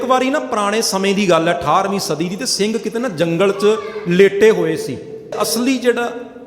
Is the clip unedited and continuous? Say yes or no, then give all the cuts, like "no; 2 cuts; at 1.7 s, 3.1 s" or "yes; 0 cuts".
no; 1 cut; at 5.4 s